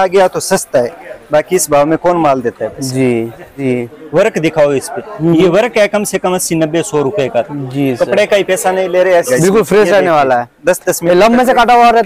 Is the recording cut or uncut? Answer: cut